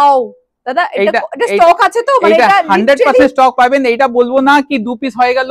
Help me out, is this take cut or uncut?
uncut